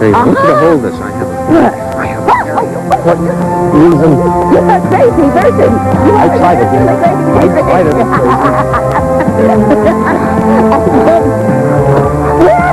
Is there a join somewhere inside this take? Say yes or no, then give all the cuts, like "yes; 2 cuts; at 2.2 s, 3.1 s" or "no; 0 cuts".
no; 0 cuts